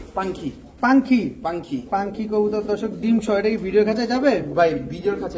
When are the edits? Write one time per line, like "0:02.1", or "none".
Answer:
none